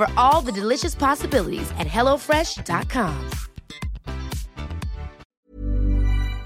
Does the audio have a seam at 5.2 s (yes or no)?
yes